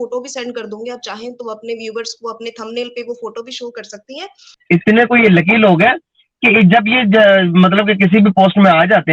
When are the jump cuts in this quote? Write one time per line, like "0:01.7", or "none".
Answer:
0:04.5